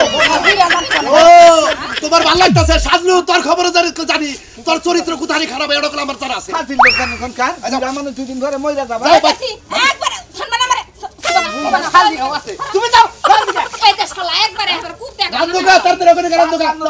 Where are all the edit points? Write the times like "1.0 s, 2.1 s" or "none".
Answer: none